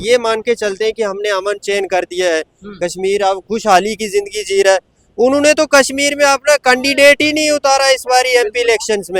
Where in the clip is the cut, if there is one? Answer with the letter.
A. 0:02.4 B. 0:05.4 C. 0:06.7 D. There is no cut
D